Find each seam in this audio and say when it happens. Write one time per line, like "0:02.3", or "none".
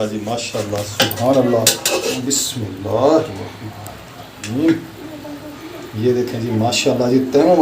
0:01.9